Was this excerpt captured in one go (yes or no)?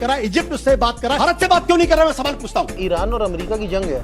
no